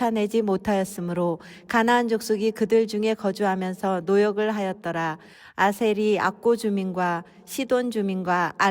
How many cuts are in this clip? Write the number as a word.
one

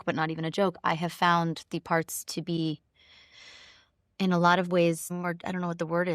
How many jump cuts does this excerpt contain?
one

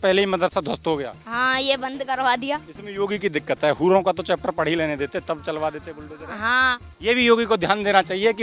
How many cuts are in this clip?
one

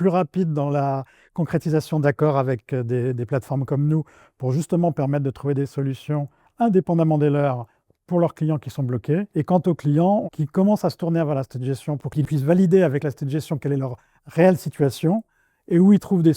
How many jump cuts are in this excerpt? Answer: three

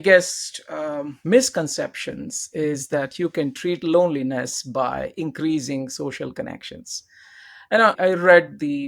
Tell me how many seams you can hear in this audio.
two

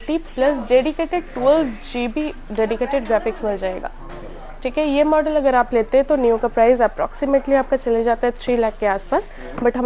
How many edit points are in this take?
zero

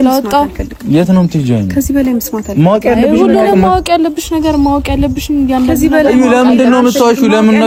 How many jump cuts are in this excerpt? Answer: zero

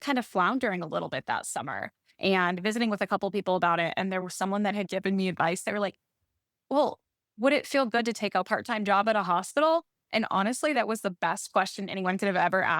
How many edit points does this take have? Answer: three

